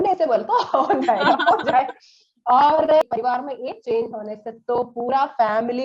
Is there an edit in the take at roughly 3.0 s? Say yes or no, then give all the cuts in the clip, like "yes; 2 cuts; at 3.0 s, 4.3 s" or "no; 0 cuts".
yes; 1 cut; at 3.0 s